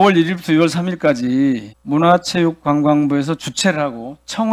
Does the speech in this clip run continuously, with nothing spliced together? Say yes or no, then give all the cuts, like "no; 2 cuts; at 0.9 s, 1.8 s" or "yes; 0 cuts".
no; 1 cut; at 1.7 s